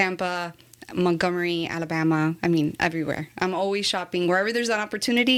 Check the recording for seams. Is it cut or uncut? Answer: uncut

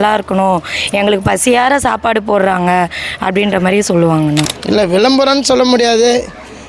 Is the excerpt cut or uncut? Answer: cut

